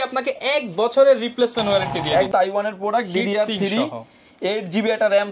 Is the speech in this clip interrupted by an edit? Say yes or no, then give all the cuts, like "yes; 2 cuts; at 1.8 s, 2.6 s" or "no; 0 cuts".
yes; 1 cut; at 2.3 s